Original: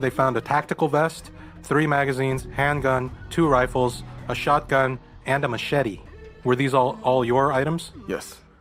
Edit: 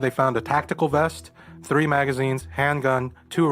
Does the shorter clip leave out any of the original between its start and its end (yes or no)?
no